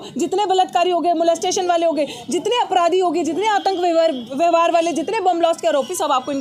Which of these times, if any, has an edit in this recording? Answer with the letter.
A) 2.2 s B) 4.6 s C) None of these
C